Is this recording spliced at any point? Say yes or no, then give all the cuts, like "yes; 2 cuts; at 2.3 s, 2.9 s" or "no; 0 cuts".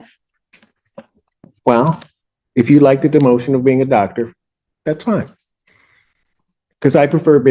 no; 0 cuts